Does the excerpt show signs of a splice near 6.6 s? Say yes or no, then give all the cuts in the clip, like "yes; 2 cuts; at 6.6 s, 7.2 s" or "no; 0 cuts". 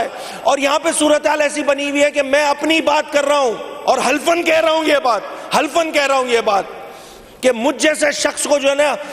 no; 0 cuts